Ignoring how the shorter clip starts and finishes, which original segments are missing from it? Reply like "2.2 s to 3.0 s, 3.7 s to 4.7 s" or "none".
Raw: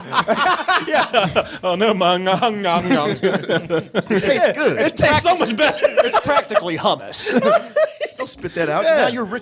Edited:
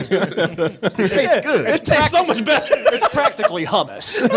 none